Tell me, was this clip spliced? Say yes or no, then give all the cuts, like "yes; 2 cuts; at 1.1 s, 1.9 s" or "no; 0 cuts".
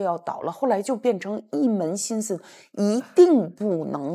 no; 0 cuts